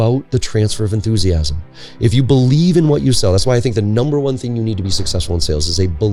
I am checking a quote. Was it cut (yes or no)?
no